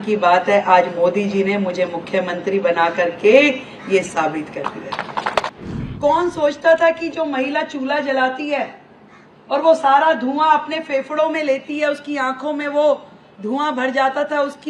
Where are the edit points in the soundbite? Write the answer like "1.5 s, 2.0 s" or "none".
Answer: 5.5 s